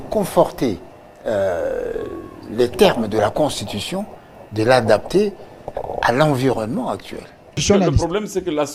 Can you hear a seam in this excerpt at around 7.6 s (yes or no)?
yes